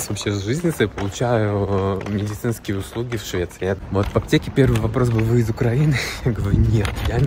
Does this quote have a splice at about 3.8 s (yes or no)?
yes